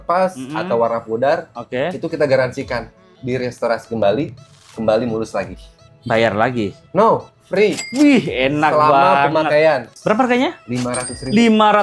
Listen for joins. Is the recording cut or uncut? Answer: cut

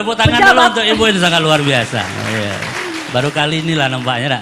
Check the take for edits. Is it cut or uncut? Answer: uncut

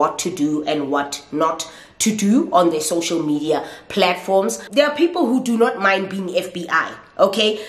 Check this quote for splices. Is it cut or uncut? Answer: cut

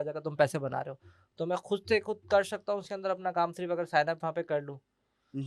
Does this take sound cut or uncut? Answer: uncut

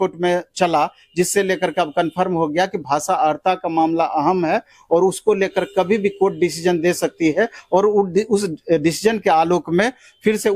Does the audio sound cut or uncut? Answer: uncut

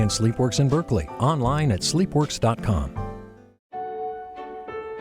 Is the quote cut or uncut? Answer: cut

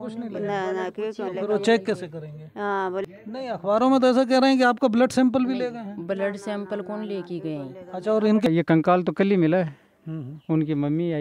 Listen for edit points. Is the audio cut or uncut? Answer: cut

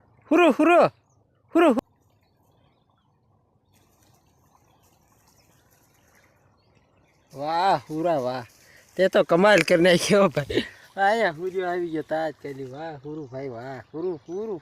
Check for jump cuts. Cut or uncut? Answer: cut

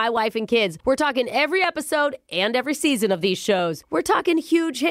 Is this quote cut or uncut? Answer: uncut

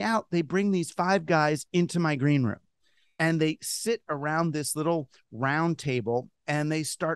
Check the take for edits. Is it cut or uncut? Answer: uncut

